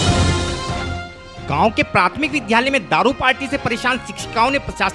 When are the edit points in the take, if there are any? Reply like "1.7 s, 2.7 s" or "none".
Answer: 1.1 s